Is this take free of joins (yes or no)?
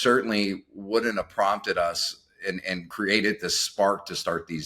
no